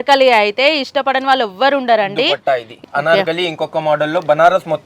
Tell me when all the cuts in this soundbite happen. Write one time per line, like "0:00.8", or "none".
0:02.8

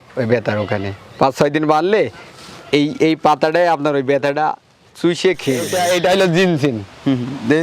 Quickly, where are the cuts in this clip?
0:05.7

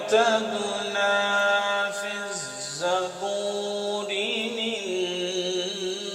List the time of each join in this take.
none

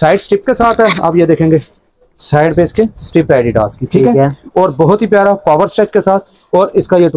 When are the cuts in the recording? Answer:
none

